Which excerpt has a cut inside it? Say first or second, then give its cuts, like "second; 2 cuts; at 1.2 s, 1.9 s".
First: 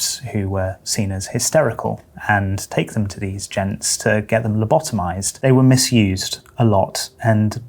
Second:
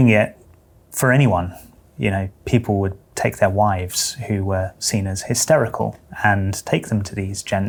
first; 1 cut; at 5.4 s